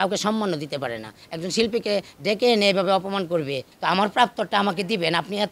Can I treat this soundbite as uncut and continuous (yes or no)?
no